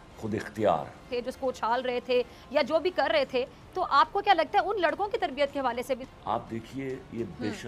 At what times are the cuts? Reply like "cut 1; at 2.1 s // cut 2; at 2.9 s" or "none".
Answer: cut 1; at 1.1 s // cut 2; at 6.0 s